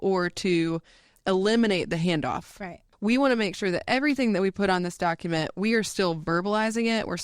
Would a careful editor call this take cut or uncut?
cut